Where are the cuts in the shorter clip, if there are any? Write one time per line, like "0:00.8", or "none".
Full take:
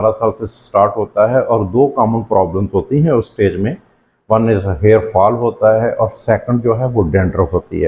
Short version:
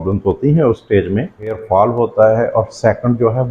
0:01.6